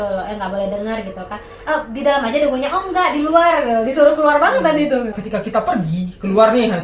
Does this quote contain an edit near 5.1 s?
yes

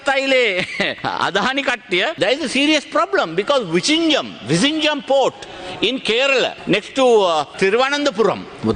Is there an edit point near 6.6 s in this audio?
yes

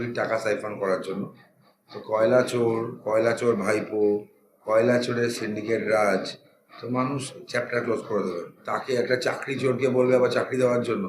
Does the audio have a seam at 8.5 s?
yes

